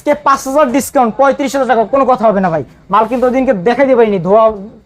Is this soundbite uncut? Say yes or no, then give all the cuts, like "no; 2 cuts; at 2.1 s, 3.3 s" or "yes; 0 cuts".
yes; 0 cuts